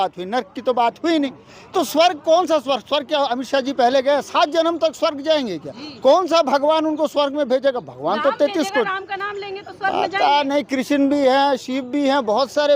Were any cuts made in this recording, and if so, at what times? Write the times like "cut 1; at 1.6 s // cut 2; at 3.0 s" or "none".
none